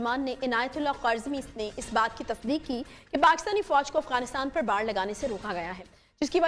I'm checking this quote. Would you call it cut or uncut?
uncut